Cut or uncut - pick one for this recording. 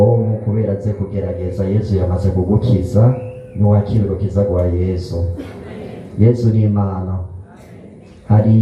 uncut